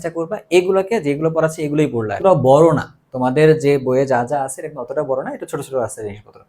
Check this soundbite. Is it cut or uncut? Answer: cut